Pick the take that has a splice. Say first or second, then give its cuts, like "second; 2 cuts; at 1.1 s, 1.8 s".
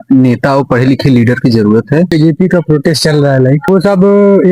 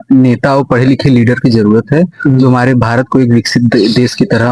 first; 1 cut; at 2.1 s